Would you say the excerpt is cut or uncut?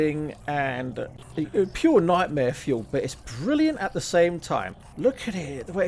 cut